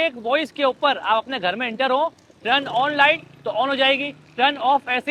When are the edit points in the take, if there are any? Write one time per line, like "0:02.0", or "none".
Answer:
none

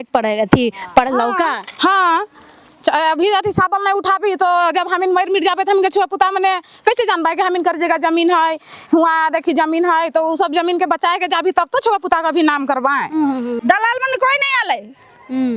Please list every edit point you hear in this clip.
0:13.6

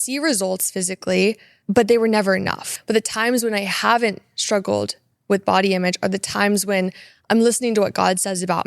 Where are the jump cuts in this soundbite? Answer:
0:01.5
0:02.7

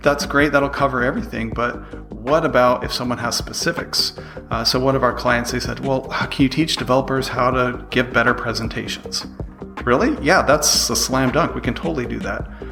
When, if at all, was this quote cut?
none

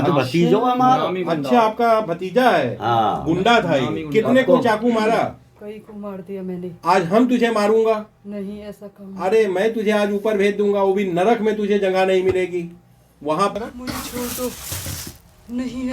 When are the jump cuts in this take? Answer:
0:13.5

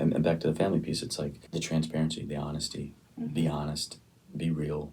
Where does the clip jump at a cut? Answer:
0:01.4

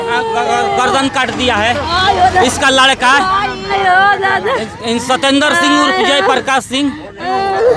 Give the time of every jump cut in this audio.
0:03.7

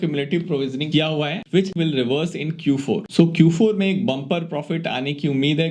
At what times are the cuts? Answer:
0:01.7
0:03.1

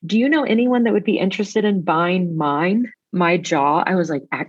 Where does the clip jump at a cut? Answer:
0:03.0

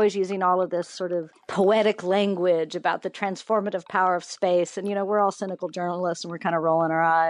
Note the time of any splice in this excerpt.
0:01.4

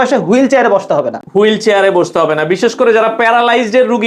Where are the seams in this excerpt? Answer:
none

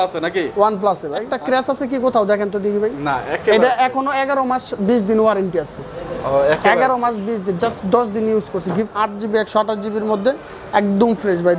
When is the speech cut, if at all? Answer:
0:01.3
0:08.9

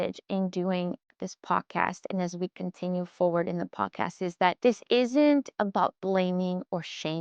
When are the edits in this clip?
0:04.6

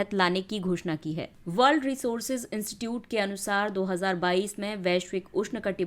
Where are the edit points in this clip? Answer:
0:01.3

